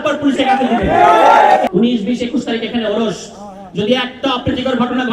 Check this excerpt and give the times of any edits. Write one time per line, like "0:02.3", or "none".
0:01.7